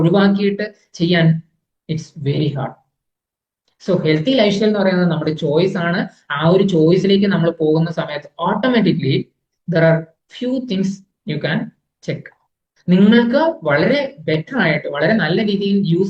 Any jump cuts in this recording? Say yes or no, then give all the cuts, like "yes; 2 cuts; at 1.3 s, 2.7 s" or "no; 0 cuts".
no; 0 cuts